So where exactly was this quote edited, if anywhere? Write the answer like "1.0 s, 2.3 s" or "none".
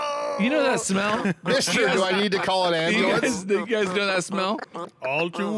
4.6 s